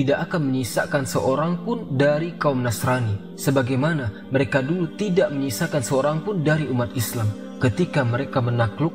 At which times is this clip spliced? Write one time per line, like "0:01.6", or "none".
none